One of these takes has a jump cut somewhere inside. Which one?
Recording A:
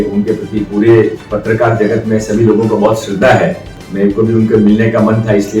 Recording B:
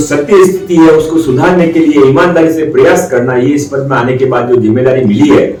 A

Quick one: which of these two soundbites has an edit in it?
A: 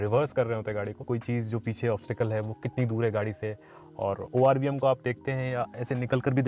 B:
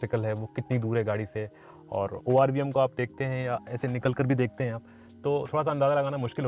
A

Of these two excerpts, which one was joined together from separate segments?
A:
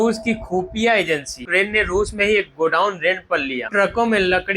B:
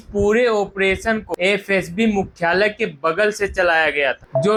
A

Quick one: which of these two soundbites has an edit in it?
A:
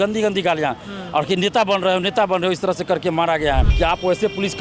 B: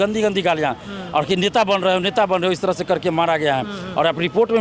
A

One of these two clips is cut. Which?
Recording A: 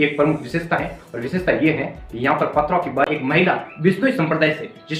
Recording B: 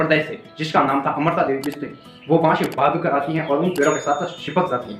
A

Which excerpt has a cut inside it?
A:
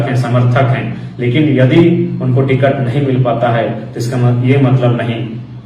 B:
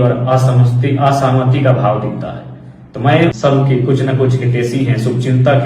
B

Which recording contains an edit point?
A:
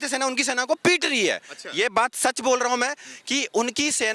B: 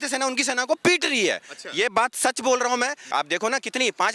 B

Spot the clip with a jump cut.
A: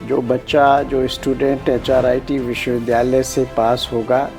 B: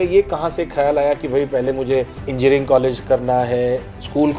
B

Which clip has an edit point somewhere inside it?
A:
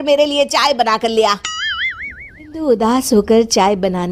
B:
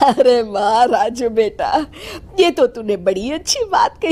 A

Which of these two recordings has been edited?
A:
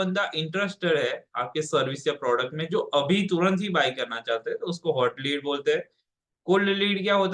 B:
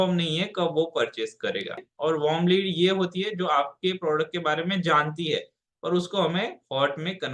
B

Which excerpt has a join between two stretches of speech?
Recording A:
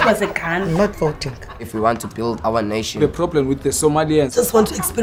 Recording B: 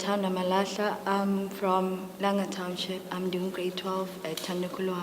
B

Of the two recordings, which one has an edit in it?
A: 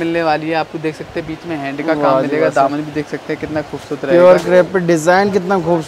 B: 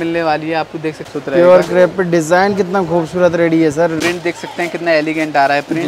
B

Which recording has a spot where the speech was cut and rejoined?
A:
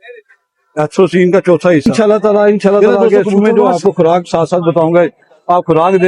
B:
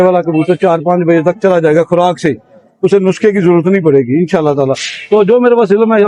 A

